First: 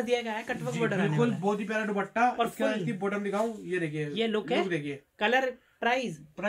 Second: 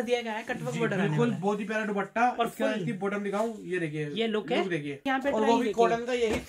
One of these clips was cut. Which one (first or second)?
second